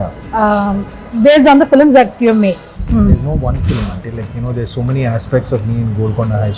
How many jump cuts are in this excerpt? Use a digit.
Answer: 1